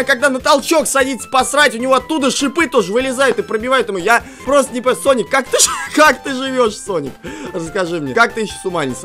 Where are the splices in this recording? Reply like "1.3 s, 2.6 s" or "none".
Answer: 4.3 s, 8.1 s